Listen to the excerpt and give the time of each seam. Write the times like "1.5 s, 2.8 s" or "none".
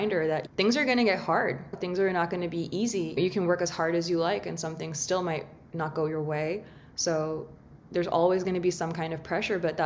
1.7 s, 3.1 s